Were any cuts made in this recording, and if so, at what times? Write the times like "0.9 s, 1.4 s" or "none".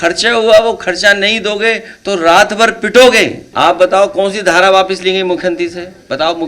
3.4 s